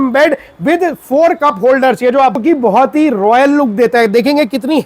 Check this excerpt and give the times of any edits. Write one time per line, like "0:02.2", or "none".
0:02.4